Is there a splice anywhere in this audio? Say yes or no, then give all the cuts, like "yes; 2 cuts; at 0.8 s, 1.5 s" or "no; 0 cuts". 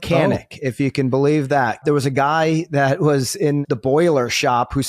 yes; 2 cuts; at 1.8 s, 3.6 s